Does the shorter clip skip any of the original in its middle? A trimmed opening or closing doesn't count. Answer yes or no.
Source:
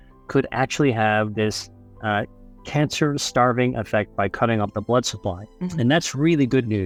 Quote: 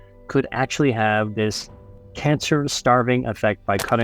yes